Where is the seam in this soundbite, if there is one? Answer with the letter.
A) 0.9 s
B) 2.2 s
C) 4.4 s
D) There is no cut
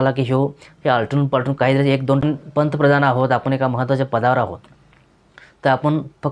B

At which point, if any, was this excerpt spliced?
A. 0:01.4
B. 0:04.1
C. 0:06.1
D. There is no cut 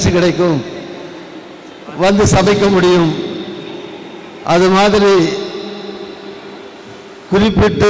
D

